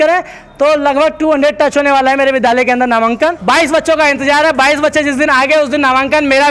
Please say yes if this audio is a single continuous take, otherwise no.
no